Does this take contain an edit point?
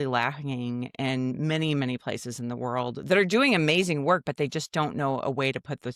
no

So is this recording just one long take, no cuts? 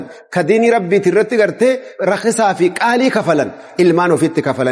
no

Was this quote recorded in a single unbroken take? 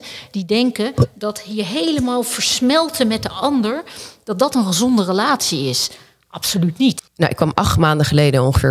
no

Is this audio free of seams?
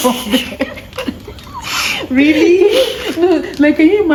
yes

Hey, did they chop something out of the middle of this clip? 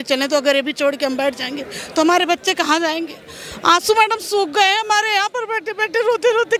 no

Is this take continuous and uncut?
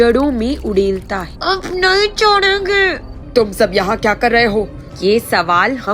no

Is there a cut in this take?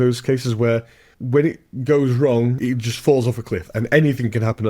yes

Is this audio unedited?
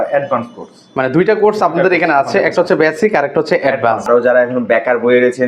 no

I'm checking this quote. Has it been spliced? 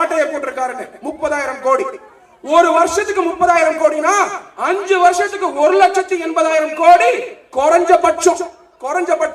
no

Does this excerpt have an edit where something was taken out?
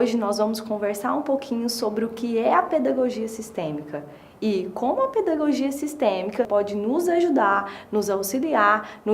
yes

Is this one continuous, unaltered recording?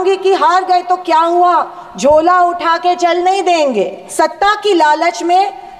no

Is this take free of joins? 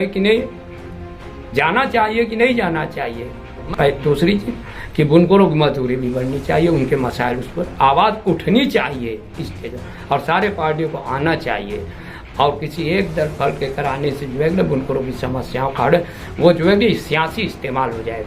no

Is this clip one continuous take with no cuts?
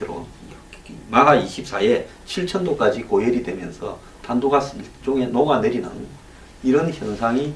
no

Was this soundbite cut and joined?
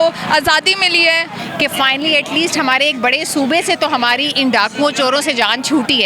yes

